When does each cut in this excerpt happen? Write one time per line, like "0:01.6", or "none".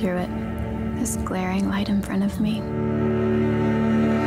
0:02.7